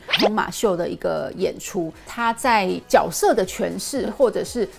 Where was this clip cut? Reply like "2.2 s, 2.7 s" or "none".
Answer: 2.0 s